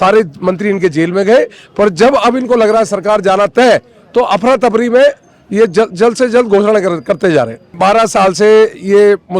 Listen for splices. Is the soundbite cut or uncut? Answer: cut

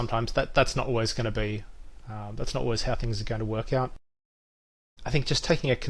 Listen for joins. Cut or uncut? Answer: uncut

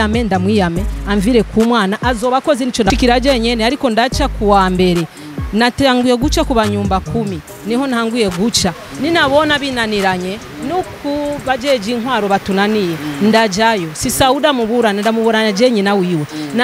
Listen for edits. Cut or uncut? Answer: cut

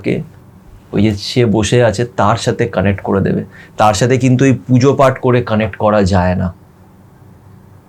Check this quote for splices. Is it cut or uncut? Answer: uncut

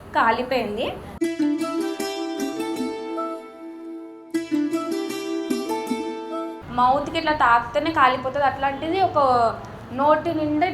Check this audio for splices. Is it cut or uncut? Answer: cut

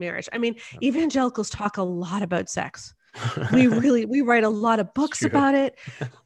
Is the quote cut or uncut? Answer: uncut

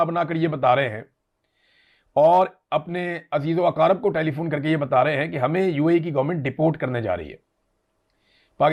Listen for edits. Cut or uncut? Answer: uncut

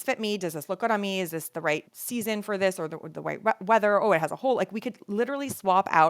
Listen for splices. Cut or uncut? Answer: cut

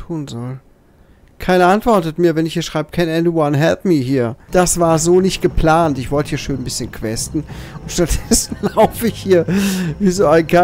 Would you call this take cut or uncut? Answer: cut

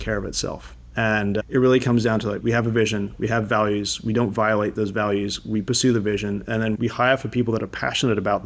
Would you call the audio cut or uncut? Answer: cut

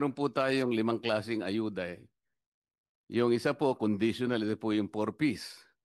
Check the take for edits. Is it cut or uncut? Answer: uncut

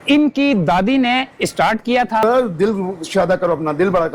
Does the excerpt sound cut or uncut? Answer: cut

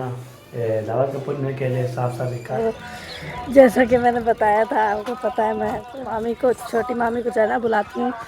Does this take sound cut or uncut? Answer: cut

